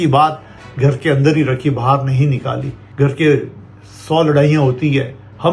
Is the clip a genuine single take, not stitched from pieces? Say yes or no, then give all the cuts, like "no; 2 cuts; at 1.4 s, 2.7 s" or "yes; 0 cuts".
no; 1 cut; at 2.8 s